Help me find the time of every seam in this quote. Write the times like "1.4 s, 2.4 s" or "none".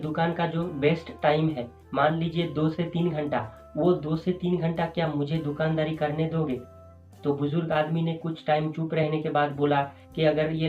none